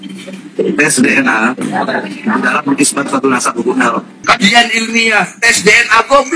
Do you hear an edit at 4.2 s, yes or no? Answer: yes